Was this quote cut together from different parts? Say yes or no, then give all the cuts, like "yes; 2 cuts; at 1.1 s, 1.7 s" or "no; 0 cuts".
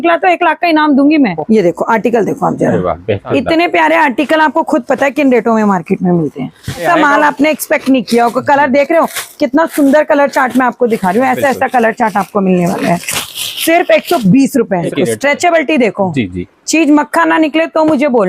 yes; 4 cuts; at 1.4 s, 3.2 s, 6.8 s, 14.9 s